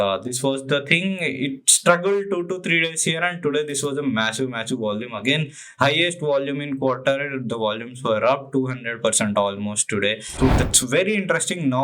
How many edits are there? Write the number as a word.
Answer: one